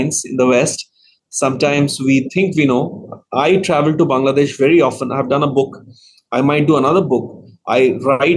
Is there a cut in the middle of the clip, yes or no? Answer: no